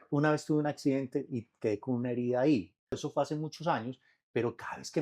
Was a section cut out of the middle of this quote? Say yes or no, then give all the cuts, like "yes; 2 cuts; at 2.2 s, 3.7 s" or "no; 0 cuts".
yes; 1 cut; at 3.0 s